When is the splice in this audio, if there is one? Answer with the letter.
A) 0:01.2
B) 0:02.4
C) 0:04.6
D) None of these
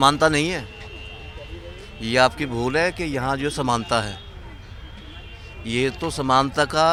D